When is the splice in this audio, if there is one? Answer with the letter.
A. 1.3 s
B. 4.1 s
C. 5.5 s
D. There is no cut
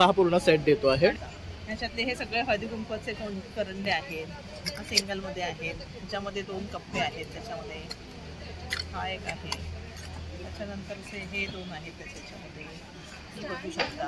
A